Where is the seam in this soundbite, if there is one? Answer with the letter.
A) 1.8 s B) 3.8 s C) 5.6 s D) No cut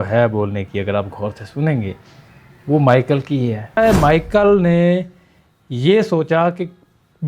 B